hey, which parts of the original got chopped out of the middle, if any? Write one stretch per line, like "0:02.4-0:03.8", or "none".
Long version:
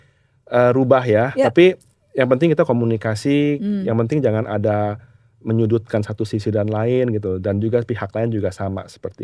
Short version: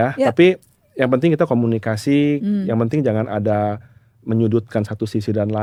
none